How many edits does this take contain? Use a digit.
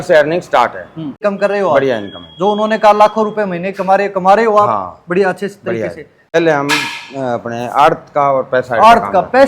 2